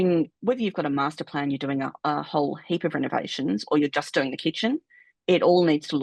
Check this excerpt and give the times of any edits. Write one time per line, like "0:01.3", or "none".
none